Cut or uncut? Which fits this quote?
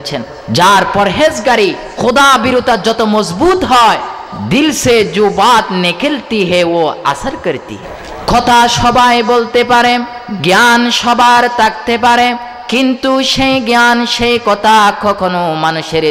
uncut